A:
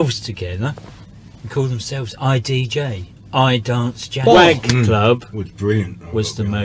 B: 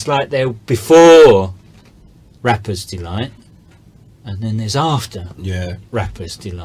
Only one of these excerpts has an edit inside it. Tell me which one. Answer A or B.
A